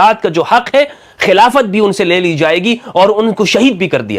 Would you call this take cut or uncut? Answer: uncut